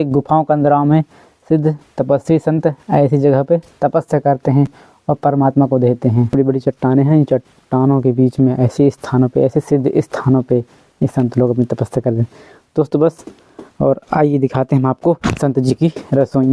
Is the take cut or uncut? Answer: uncut